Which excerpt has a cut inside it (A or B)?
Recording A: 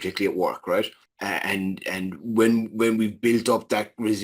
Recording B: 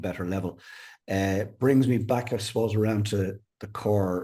A